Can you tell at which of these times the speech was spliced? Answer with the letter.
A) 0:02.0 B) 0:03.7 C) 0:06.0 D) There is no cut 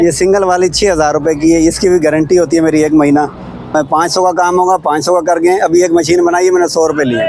B